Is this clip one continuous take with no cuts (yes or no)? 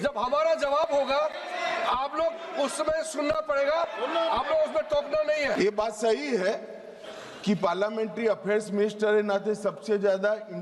no